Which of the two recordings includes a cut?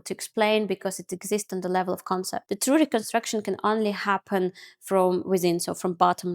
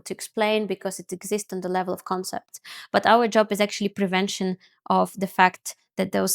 first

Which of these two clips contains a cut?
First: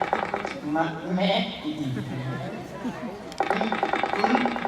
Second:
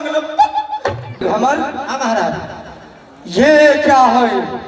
second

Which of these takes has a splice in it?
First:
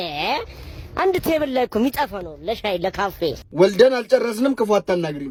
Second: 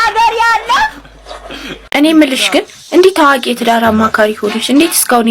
second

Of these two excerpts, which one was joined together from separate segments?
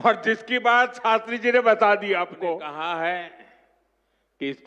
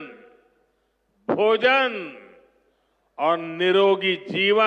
first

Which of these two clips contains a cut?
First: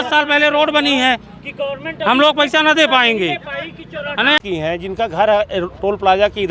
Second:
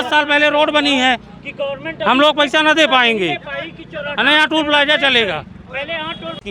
first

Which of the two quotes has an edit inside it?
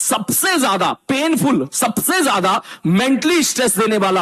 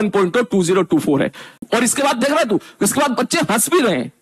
second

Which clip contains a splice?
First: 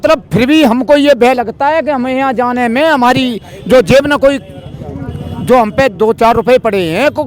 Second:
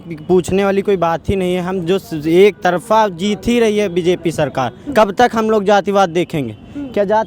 second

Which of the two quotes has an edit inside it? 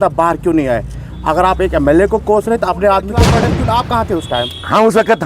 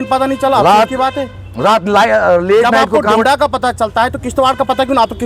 first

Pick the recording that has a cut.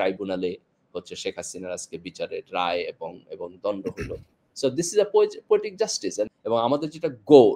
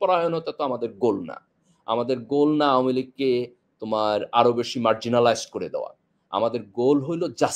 first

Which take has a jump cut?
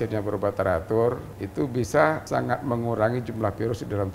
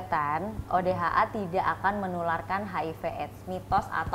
first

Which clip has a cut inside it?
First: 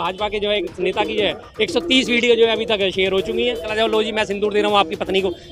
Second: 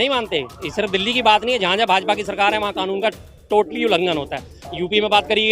first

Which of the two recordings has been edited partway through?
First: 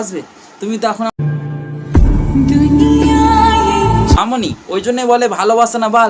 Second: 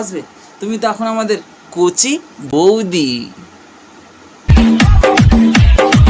first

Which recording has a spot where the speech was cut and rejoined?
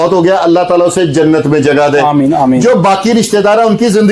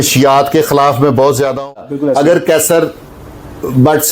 second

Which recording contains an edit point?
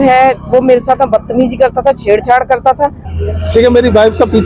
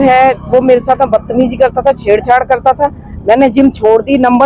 first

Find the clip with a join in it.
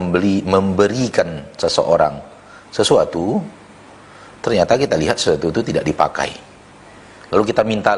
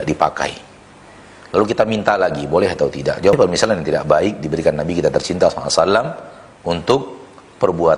second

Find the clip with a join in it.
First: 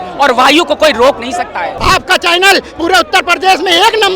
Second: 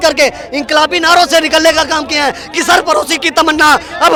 first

